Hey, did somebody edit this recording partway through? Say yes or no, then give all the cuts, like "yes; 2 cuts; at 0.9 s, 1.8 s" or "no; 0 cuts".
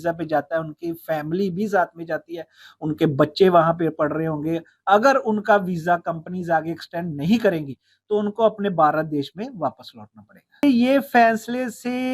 yes; 1 cut; at 10.6 s